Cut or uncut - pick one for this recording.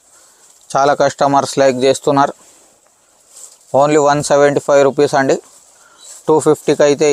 uncut